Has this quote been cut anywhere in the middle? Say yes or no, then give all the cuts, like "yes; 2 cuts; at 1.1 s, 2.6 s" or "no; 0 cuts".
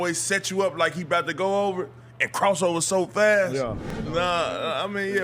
yes; 1 cut; at 4.0 s